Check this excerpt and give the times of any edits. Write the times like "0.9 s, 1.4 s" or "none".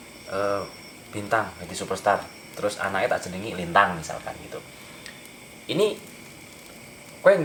none